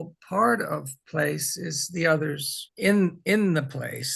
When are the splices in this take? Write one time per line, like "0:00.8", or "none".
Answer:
0:02.6